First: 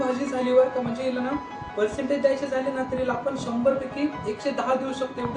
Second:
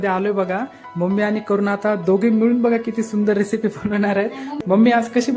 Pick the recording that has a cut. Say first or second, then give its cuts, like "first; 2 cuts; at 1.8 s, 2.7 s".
second; 1 cut; at 4.5 s